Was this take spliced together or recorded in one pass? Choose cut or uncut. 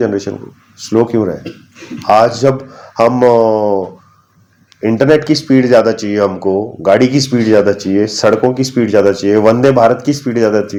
uncut